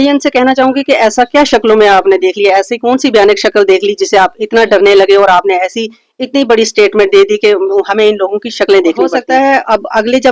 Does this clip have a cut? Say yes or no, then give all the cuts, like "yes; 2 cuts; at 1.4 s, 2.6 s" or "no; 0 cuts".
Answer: yes; 1 cut; at 9.2 s